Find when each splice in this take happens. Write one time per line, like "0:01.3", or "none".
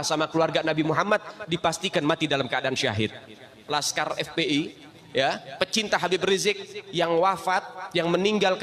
0:03.5